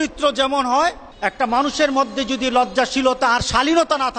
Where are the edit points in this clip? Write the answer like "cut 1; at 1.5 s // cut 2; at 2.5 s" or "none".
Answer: cut 1; at 1.1 s

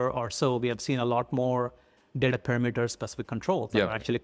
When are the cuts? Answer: none

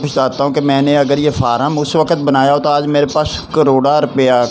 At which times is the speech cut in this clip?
none

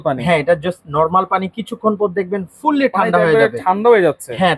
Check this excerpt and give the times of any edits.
none

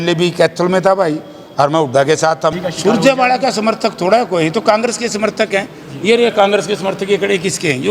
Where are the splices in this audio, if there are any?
cut 1; at 2.6 s

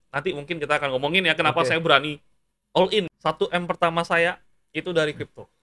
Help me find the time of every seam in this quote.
cut 1; at 3.1 s

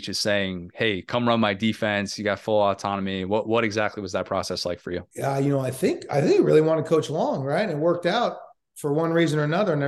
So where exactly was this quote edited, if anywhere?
cut 1; at 5.1 s

